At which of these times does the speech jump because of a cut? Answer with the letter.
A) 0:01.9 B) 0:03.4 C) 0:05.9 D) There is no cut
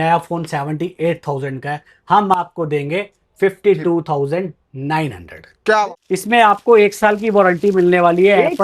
C